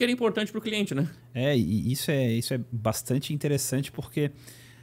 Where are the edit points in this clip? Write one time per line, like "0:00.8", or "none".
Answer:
none